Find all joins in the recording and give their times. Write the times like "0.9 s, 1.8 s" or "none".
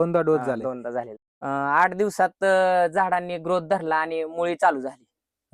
1.1 s

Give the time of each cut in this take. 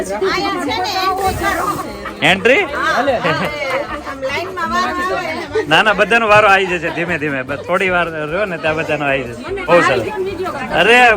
9.7 s

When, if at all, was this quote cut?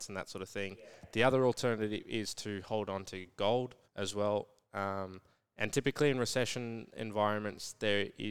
3.8 s

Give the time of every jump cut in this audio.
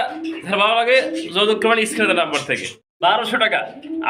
2.9 s

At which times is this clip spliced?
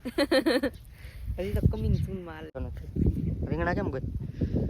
2.7 s

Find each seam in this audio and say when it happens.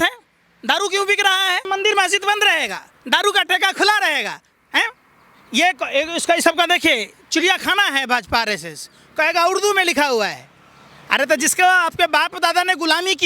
1.6 s

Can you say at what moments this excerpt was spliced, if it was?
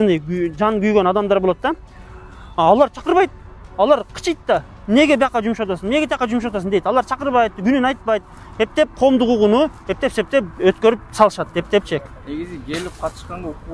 none

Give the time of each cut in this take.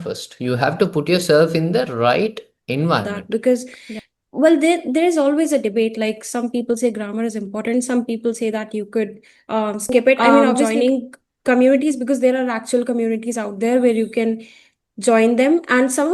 3.1 s, 3.8 s, 10.7 s

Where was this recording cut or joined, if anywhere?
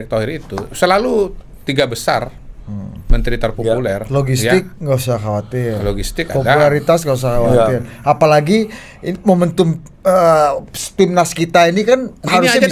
none

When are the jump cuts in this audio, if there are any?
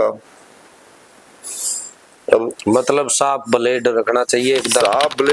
none

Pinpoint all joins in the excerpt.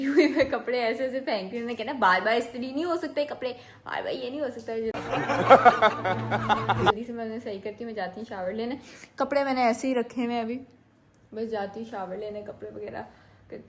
none

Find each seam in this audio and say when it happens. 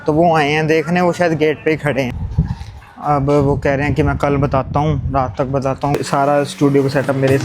2.2 s, 6.0 s

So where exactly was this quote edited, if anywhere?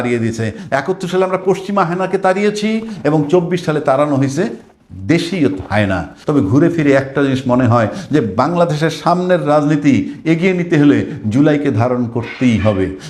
6.1 s

